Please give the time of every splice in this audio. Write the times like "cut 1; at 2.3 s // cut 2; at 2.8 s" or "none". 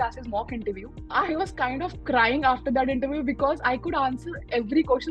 cut 1; at 0.9 s